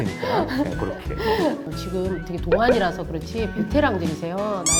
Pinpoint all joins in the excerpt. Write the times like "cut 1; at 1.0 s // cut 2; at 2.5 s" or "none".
none